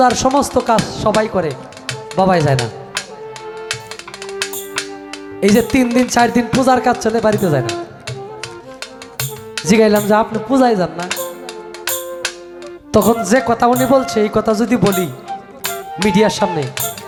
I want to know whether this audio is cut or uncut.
uncut